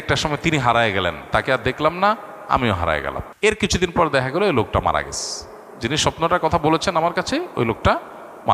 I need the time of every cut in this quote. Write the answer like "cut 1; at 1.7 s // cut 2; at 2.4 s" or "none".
cut 1; at 3.2 s